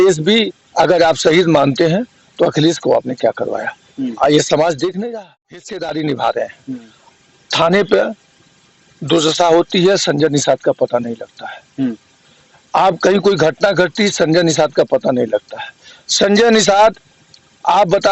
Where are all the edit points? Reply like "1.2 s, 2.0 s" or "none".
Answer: 5.0 s